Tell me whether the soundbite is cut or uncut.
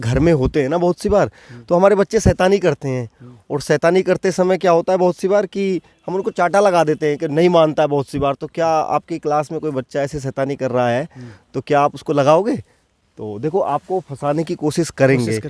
uncut